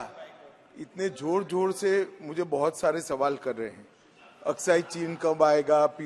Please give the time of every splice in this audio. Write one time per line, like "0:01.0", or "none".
none